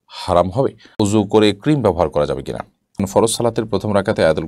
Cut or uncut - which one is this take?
cut